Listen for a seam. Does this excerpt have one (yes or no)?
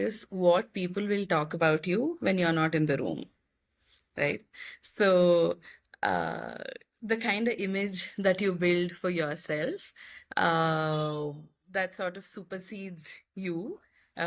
no